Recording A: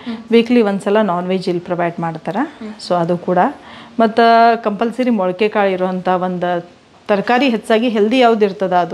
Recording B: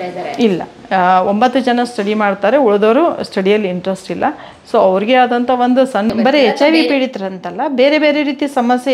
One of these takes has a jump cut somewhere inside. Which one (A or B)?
B